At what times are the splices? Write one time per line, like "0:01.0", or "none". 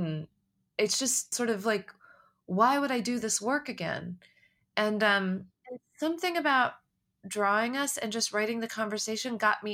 0:01.3